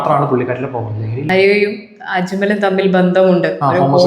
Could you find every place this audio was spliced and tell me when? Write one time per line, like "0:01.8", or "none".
0:01.3